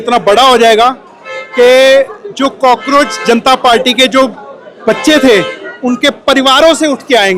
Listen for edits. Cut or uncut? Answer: uncut